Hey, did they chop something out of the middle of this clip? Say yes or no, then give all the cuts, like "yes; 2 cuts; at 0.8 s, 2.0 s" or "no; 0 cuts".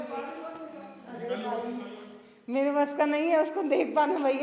no; 0 cuts